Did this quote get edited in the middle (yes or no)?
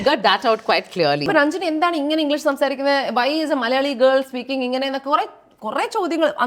yes